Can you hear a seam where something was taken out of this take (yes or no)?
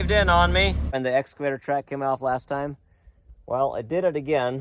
yes